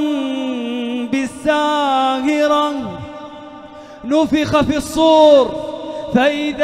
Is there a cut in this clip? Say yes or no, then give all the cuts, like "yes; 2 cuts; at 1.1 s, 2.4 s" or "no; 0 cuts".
no; 0 cuts